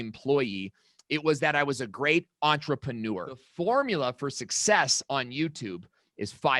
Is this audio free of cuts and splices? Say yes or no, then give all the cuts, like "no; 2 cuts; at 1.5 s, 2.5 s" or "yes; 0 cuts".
no; 1 cut; at 3.4 s